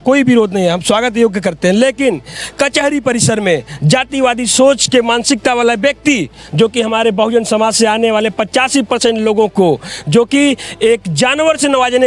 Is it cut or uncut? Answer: uncut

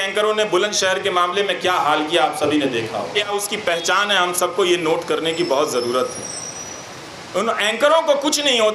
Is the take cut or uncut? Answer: cut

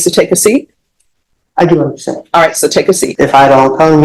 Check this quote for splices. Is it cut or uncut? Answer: cut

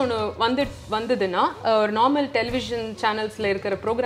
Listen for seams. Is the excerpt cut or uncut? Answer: uncut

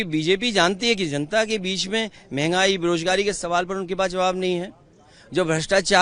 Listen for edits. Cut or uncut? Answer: uncut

